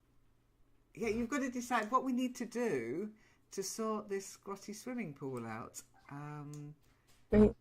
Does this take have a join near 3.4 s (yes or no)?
yes